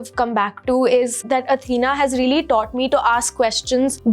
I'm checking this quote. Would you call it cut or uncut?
uncut